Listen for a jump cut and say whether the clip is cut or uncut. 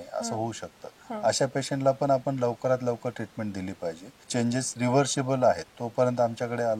cut